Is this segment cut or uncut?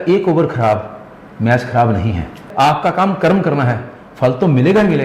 cut